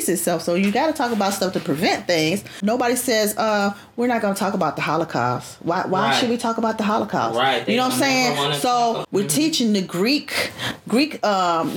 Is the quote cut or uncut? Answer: cut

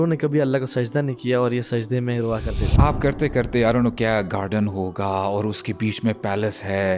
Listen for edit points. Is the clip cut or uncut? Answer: cut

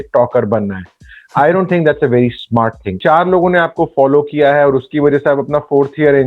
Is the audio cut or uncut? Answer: cut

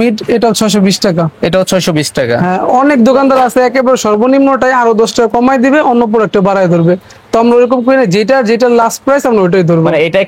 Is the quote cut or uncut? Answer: uncut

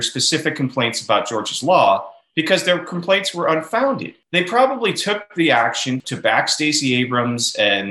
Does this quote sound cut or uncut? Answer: cut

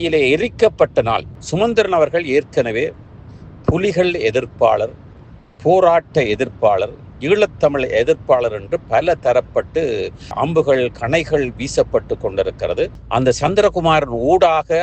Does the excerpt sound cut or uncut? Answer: cut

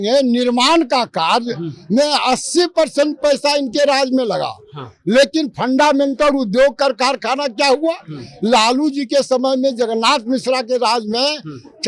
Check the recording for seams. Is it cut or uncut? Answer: uncut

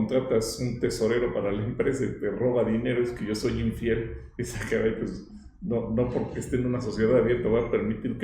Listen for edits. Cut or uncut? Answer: uncut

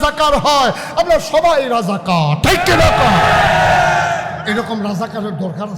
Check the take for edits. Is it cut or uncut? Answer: cut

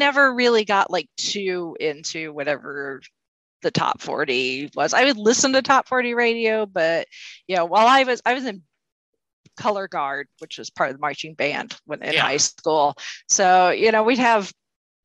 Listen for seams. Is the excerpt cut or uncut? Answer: uncut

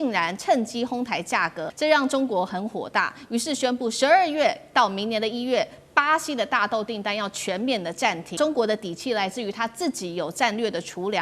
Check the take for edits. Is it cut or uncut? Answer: cut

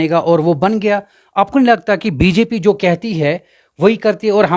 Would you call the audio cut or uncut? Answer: uncut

